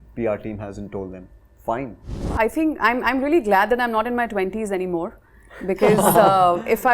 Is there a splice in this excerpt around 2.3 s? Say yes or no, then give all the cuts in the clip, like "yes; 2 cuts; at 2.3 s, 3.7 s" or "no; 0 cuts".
yes; 1 cut; at 2.3 s